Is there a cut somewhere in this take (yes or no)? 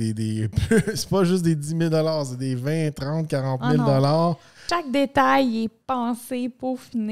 yes